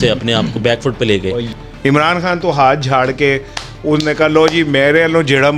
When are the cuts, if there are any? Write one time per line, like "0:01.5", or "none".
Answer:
0:01.5